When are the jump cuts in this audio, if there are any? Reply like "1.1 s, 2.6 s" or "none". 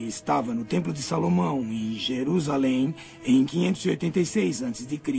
1.0 s